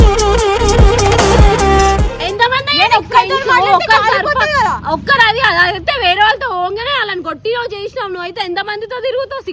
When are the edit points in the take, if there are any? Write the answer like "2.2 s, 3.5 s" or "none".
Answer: none